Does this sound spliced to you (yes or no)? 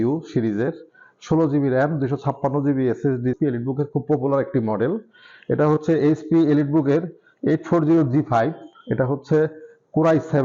yes